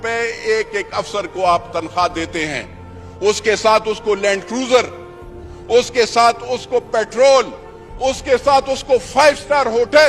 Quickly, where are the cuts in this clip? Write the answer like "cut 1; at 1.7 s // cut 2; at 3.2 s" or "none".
none